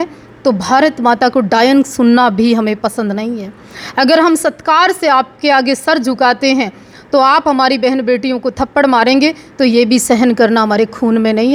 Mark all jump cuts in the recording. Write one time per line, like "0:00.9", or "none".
none